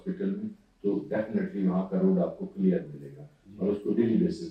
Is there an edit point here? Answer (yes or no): no